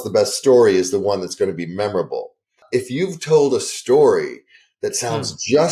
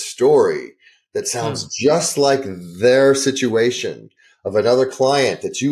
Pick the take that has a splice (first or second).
first